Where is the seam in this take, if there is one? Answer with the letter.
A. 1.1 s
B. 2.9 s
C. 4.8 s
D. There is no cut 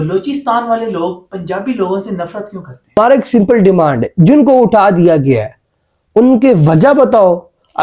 B